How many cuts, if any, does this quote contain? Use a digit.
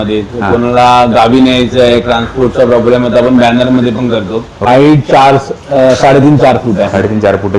1